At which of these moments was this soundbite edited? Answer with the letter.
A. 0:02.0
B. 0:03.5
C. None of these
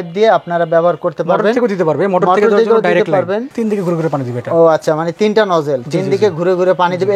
B